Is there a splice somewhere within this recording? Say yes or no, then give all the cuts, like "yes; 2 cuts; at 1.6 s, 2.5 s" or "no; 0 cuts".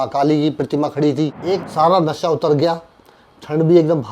yes; 1 cut; at 1.6 s